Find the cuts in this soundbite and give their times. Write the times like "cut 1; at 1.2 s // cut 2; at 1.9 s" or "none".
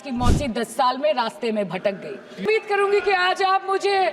cut 1; at 2.4 s